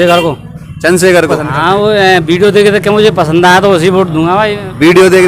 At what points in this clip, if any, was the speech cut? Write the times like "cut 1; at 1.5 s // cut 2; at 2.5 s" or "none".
cut 1; at 1.4 s